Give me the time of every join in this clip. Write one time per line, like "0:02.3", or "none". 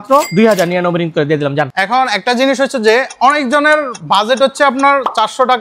0:01.7